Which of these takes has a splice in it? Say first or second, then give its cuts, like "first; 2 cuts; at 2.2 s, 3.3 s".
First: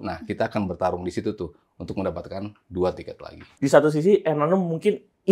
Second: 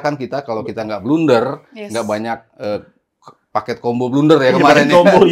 first; 1 cut; at 3.5 s